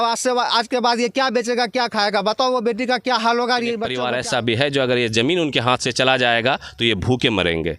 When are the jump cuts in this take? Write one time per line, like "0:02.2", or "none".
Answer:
0:03.9